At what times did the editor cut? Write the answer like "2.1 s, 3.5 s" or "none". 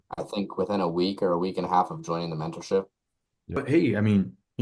3.6 s